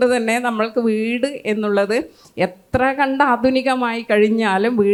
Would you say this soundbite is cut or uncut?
uncut